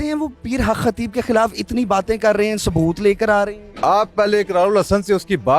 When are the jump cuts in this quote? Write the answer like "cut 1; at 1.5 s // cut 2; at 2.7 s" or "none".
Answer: cut 1; at 3.7 s